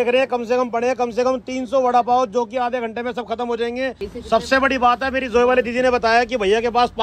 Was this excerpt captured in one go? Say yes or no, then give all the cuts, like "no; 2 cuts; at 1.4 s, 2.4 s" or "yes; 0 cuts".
no; 1 cut; at 4.1 s